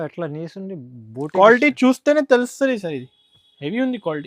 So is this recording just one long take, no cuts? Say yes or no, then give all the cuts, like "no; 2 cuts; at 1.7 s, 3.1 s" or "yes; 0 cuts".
yes; 0 cuts